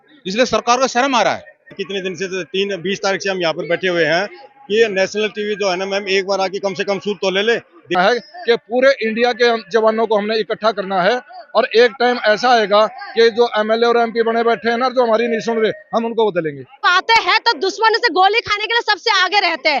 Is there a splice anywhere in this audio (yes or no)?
yes